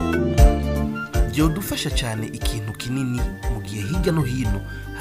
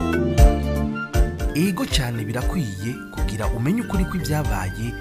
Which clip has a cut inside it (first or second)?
second